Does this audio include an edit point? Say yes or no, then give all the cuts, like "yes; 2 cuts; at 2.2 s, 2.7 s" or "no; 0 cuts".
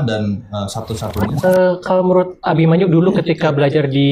yes; 1 cut; at 1.4 s